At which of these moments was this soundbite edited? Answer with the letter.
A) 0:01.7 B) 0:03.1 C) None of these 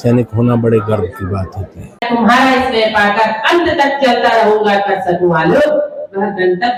C